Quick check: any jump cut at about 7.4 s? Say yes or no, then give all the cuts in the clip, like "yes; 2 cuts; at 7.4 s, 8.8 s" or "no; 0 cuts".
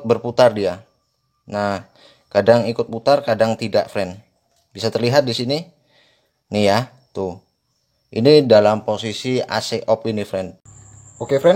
no; 1 cut; at 10.5 s